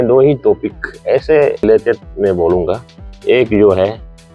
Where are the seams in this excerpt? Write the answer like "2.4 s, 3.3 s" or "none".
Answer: 1.6 s